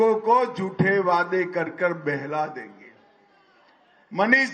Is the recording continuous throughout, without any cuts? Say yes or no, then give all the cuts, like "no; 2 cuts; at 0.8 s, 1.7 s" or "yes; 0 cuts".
no; 1 cut; at 2.6 s